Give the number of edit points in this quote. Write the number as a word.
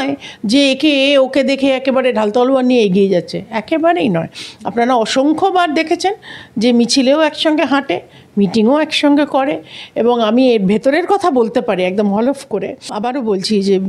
one